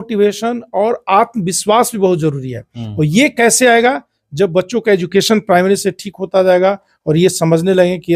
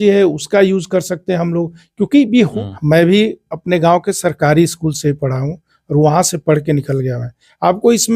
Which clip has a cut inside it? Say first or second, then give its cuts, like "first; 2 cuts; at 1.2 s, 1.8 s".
second; 1 cut; at 2.5 s